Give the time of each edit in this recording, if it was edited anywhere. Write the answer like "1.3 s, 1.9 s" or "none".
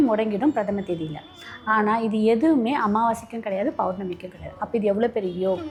none